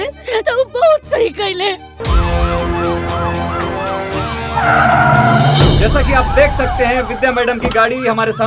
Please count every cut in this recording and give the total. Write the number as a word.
one